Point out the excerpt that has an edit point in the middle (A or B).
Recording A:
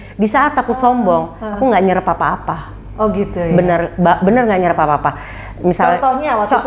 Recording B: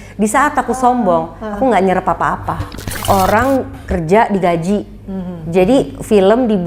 B